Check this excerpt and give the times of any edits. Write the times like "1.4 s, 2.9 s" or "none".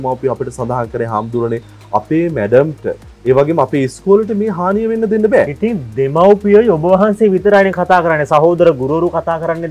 none

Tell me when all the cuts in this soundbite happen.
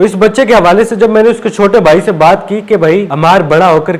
none

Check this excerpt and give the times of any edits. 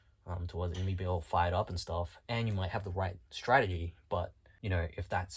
4.5 s

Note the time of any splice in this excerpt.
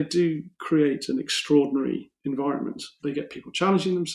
2.9 s

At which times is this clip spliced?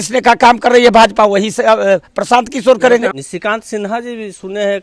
3.2 s

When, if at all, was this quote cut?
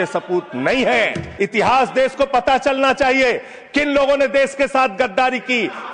1.2 s

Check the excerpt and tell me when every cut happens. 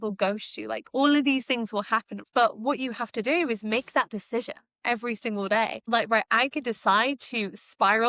2.2 s, 5.9 s

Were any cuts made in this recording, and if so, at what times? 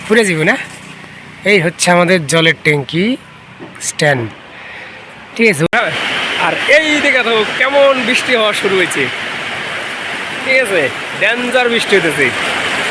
5.7 s

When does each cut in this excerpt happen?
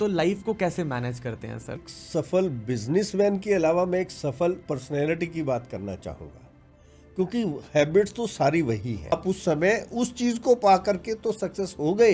1.9 s, 9.1 s

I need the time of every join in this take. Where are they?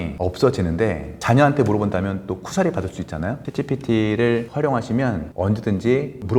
3.4 s, 5.2 s

